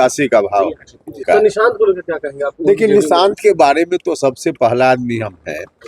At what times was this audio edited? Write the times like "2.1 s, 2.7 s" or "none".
1.2 s